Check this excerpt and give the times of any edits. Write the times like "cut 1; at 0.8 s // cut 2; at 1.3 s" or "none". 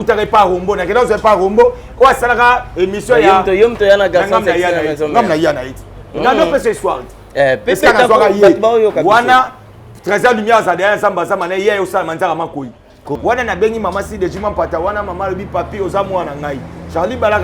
cut 1; at 13.1 s